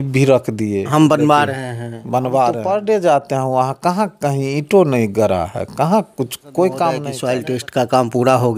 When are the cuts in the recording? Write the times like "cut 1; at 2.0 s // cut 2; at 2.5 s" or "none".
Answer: cut 1; at 2.6 s // cut 2; at 7.1 s